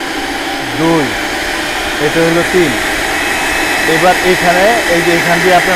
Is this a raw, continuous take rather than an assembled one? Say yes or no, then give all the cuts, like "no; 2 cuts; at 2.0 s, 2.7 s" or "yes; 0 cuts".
yes; 0 cuts